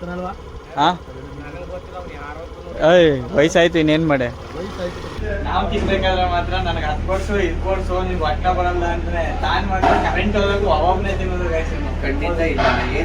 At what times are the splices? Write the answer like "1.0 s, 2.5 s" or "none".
5.1 s